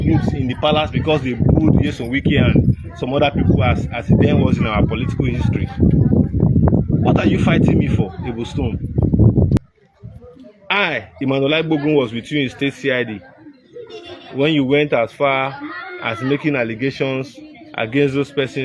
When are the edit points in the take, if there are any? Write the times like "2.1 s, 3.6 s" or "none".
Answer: 9.6 s